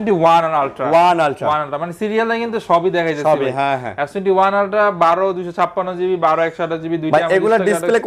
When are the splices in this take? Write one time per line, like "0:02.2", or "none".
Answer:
none